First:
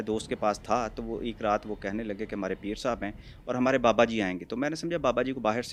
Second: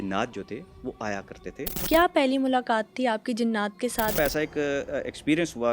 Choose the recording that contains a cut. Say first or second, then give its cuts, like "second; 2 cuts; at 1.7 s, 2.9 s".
second; 2 cuts; at 1.8 s, 4.2 s